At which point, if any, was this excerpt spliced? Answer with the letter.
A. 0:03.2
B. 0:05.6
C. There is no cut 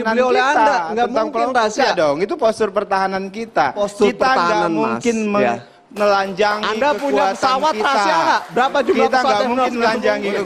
C